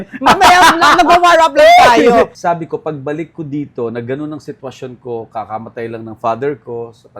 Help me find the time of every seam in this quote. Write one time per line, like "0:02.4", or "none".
0:02.4